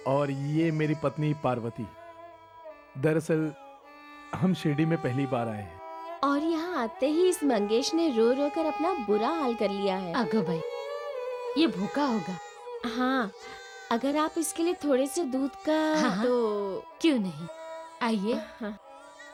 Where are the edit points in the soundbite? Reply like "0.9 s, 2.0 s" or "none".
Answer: none